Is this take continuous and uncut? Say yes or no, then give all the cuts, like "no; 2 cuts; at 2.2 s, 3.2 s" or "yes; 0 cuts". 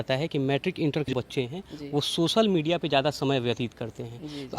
no; 1 cut; at 1.1 s